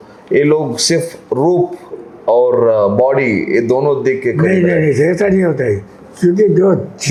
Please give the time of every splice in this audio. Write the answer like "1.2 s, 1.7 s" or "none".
none